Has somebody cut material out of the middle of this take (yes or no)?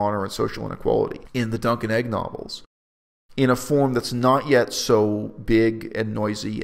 yes